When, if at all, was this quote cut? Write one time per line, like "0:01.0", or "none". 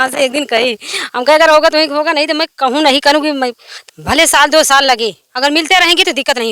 0:03.7